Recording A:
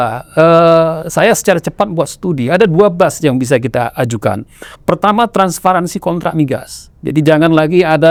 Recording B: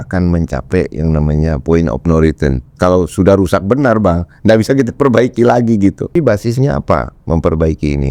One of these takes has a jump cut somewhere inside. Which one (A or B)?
B